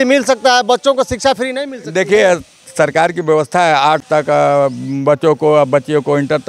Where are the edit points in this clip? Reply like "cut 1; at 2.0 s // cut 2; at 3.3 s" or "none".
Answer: none